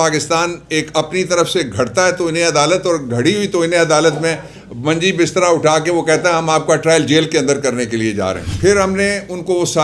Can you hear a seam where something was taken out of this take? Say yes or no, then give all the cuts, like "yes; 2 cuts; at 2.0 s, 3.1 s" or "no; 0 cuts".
yes; 1 cut; at 8.5 s